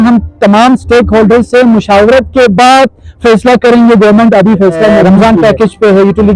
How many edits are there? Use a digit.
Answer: 1